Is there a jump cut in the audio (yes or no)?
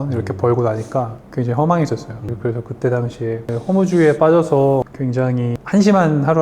yes